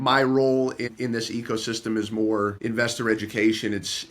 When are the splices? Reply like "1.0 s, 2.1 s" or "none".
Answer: 0.9 s, 2.6 s